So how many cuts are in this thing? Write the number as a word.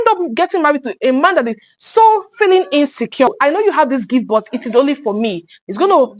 one